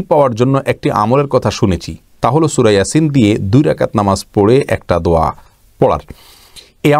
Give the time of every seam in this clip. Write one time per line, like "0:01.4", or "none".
none